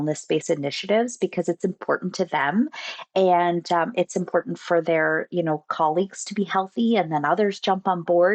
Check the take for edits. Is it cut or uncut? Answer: uncut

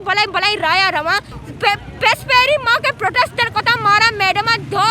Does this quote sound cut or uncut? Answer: cut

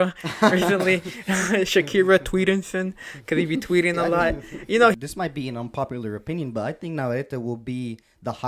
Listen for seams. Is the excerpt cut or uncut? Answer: cut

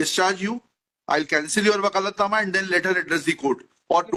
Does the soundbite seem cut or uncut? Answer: uncut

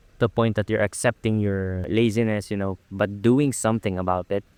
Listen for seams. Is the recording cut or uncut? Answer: uncut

